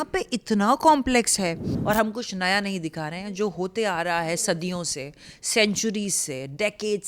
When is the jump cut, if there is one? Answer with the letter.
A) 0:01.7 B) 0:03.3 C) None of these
A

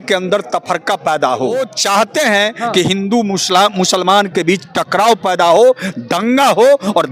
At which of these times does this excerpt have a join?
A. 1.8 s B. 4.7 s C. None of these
A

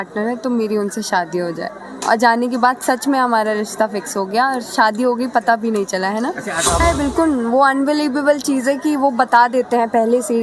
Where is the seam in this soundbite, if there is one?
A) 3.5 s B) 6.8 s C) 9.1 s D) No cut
B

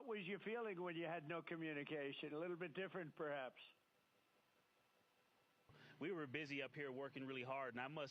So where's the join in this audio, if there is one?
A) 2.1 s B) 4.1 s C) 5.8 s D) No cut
C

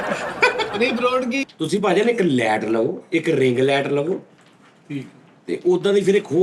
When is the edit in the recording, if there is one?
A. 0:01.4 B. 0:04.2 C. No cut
A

